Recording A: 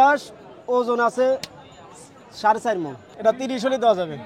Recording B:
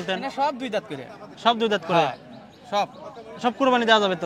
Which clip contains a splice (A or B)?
A